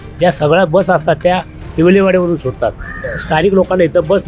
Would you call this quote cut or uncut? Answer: uncut